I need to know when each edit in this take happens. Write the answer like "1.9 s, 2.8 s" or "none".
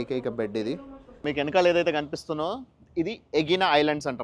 1.1 s